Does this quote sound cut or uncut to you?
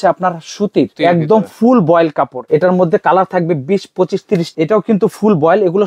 cut